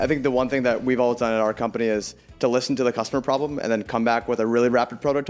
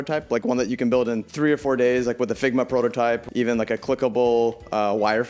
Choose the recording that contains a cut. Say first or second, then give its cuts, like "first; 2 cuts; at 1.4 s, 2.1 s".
second; 2 cuts; at 1.3 s, 3.3 s